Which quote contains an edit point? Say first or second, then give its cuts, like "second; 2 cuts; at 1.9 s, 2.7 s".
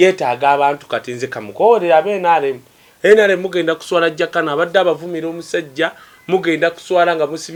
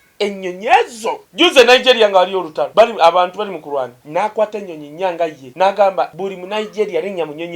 second; 5 cuts; at 1.2 s, 2.6 s, 4.0 s, 5.4 s, 6.1 s